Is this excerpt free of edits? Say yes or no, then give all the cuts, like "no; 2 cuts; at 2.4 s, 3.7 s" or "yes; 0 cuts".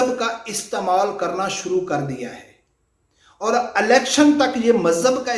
yes; 0 cuts